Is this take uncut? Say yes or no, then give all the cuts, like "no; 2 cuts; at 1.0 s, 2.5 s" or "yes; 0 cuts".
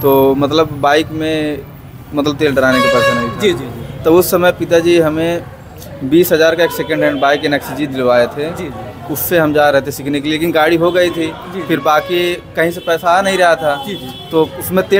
yes; 0 cuts